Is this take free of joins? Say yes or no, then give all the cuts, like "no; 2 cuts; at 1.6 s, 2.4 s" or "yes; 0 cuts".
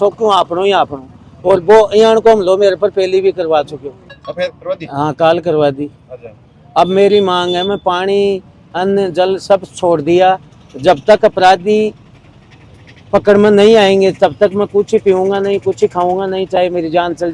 yes; 0 cuts